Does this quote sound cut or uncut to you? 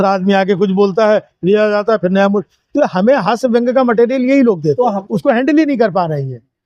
cut